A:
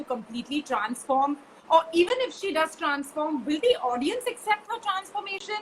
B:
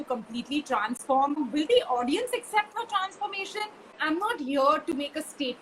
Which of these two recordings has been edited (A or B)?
B